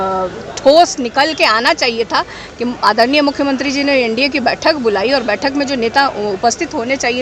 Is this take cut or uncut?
uncut